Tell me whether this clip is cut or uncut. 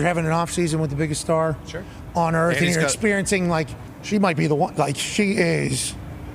uncut